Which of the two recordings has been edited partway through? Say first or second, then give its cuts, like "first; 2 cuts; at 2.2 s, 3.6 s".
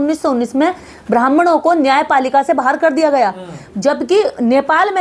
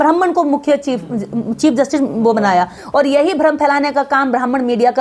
second; 1 cut; at 2.8 s